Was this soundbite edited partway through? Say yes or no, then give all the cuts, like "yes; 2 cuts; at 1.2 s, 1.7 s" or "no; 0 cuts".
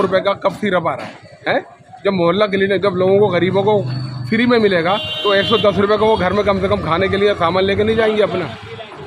no; 0 cuts